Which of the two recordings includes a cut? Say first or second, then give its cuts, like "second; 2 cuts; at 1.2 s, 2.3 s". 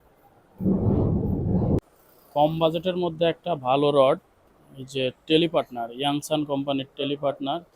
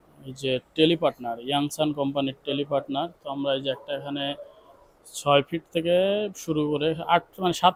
first; 1 cut; at 1.8 s